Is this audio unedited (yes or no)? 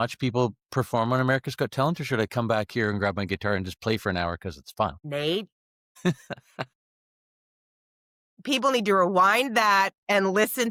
yes